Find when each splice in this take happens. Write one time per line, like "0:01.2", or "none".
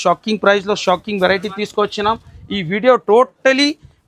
none

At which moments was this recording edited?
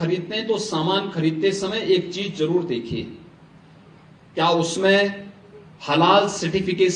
none

